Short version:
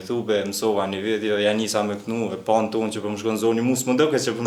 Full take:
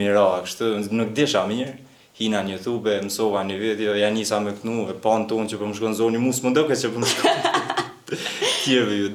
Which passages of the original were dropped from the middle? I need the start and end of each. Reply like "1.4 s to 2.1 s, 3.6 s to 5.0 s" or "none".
none